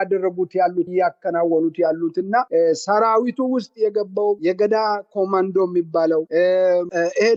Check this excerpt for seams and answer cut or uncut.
uncut